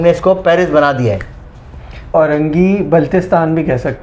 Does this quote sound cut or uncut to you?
cut